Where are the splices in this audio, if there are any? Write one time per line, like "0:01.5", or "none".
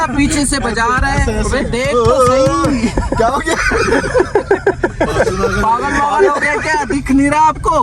0:01.8